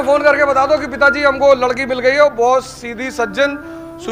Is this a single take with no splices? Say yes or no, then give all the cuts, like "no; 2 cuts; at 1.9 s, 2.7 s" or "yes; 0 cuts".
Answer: yes; 0 cuts